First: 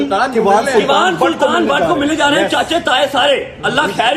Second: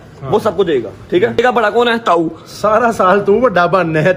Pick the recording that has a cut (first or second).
second